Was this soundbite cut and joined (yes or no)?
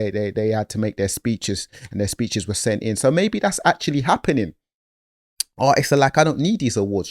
no